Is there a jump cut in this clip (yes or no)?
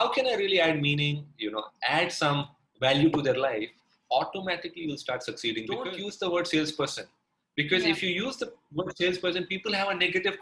yes